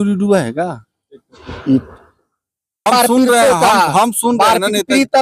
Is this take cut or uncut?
cut